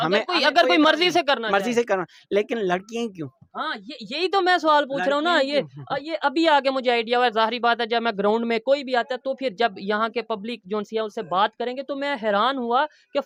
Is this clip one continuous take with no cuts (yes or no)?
yes